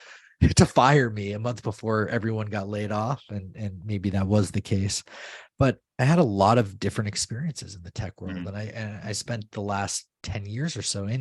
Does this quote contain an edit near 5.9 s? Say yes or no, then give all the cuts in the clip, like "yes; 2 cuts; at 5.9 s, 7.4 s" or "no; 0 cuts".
yes; 1 cut; at 5.9 s